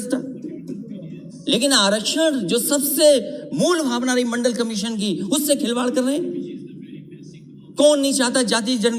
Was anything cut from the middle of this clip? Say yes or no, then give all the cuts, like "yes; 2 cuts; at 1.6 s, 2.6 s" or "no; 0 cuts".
no; 0 cuts